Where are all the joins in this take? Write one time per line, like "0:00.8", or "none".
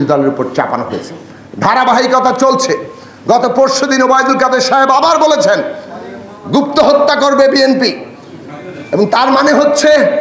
none

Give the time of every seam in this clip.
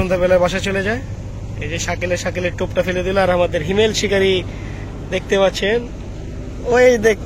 none

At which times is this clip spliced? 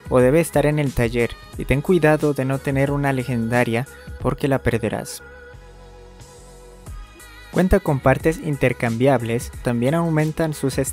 0:05.1
0:07.5
0:09.6

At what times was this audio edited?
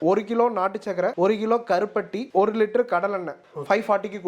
0:01.1
0:02.2
0:03.4

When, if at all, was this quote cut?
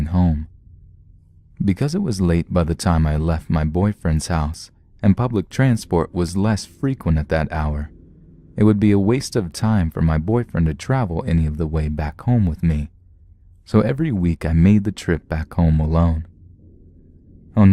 0:03.2

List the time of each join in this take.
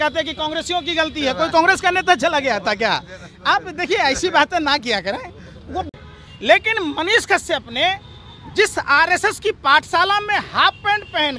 0:05.9

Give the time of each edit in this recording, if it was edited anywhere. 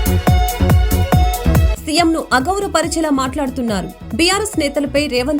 0:01.7

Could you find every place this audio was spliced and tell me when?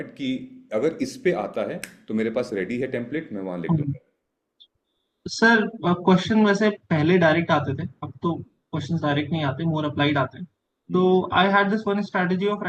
none

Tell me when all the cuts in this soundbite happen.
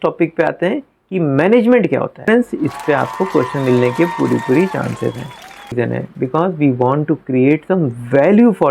0:02.3
0:05.7

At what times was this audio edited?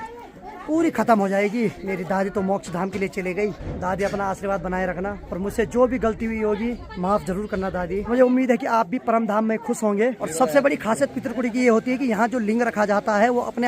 0:01.8
0:03.7
0:05.2
0:06.9
0:08.1
0:10.2

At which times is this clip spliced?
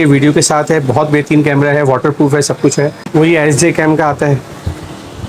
0:03.0

